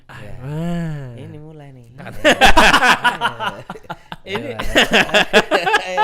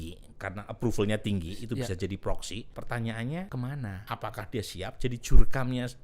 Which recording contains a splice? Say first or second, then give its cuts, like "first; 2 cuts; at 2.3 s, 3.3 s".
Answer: second; 2 cuts; at 2.7 s, 3.7 s